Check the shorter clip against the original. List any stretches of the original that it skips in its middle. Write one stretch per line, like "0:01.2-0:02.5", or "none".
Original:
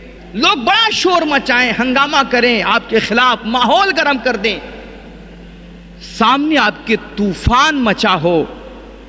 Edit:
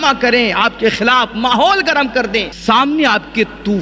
0:04.6-0:06.1